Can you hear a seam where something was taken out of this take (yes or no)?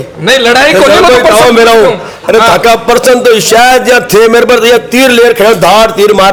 no